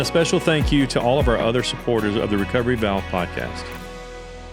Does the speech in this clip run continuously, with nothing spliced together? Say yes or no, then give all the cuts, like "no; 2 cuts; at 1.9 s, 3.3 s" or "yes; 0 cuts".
no; 1 cut; at 3.5 s